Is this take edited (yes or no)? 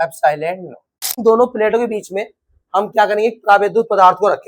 yes